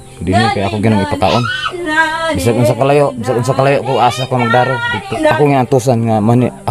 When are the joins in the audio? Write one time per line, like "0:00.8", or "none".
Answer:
0:05.0

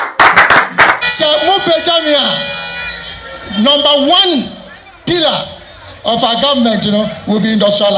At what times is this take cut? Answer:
0:01.1

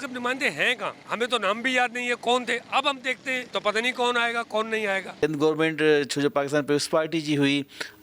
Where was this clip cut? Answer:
0:01.0
0:03.4
0:05.2

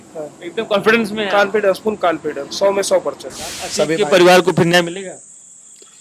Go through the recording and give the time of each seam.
0:03.6

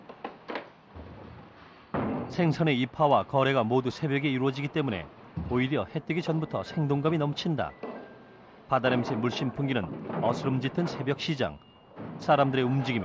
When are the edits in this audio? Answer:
0:08.2

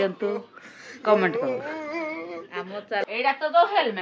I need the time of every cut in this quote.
0:03.0

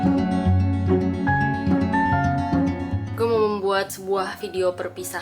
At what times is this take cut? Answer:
none

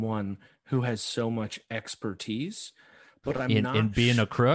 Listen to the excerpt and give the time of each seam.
0:03.5

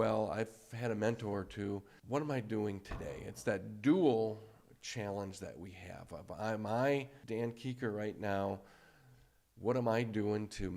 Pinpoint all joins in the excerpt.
0:01.9
0:07.2

